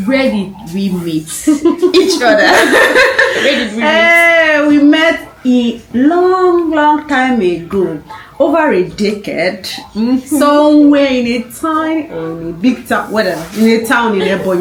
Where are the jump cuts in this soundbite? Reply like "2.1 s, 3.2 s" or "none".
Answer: none